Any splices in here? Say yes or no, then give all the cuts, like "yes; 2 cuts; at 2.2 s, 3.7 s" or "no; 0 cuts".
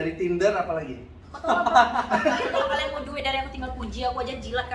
yes; 1 cut; at 3.0 s